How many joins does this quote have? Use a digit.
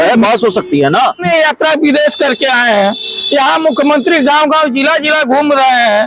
1